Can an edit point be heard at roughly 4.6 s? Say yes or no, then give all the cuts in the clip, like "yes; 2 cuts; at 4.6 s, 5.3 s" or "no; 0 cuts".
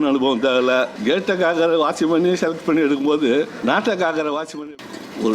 yes; 3 cuts; at 1.0 s, 3.5 s, 4.6 s